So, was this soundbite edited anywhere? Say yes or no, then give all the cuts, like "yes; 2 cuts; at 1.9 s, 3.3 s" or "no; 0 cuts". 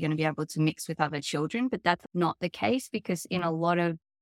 yes; 1 cut; at 2.0 s